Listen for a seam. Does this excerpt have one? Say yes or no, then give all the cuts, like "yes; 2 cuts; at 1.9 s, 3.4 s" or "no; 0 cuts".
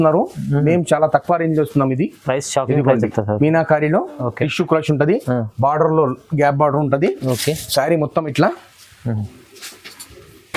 no; 0 cuts